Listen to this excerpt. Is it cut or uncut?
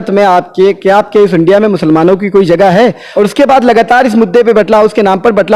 cut